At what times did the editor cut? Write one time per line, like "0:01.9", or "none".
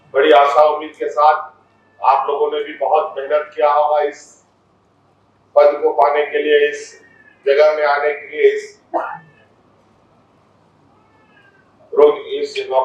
none